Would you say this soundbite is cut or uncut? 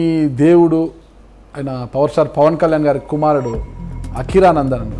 uncut